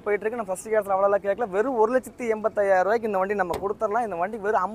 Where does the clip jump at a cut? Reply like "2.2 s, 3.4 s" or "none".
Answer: none